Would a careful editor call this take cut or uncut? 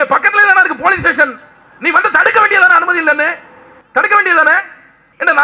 uncut